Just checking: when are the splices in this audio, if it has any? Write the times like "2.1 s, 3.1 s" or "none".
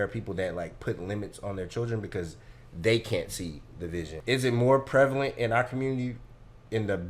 4.2 s